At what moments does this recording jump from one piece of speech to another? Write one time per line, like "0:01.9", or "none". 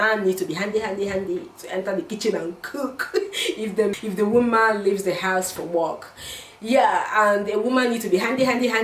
0:03.9